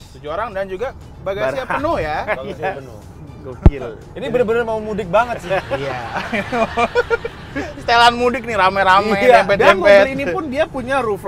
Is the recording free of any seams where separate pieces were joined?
yes; 0 cuts

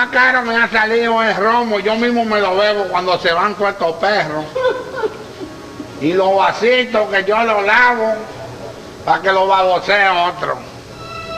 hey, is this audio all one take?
no; 1 cut; at 7.5 s

